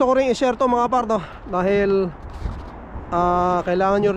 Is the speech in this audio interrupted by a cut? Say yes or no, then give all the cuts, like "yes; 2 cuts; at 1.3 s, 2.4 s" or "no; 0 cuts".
no; 0 cuts